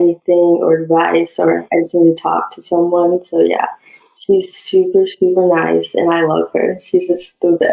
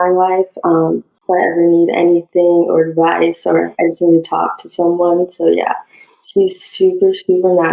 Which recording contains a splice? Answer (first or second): second